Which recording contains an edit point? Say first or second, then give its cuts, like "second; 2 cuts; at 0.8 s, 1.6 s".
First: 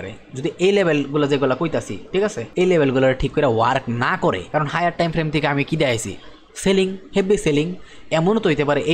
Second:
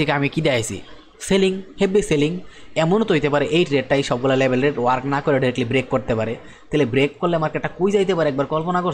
first; 2 cuts; at 2.4 s, 4.4 s